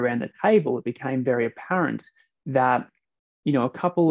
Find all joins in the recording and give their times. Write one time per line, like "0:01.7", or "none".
none